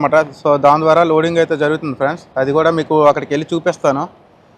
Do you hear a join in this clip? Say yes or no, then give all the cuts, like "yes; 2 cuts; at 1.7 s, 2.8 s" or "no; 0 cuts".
no; 0 cuts